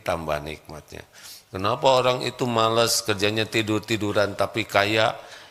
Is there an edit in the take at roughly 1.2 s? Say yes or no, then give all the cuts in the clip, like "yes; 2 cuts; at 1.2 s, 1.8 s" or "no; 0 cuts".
no; 0 cuts